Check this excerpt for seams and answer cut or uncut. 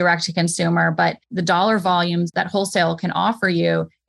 cut